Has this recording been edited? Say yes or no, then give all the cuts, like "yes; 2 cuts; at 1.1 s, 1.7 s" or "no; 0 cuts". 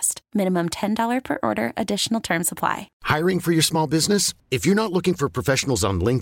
yes; 1 cut; at 2.9 s